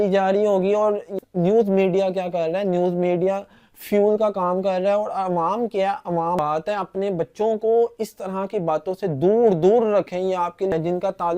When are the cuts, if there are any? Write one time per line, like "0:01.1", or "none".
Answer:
0:01.2
0:06.4
0:10.7